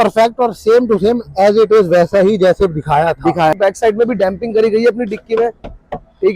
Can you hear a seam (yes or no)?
yes